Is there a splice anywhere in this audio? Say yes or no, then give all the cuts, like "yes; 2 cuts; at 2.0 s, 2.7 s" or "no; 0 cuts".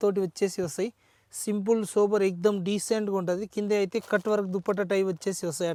no; 0 cuts